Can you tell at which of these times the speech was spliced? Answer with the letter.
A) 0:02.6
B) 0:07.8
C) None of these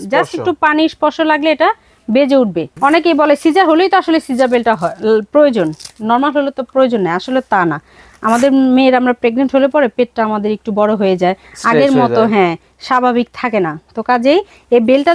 A